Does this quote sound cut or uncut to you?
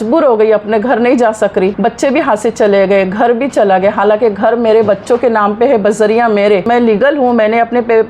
cut